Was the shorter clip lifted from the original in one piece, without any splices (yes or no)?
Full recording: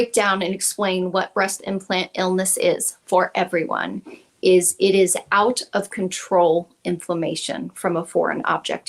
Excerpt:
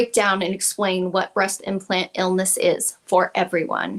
yes